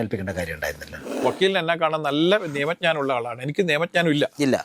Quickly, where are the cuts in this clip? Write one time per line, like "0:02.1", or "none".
0:01.2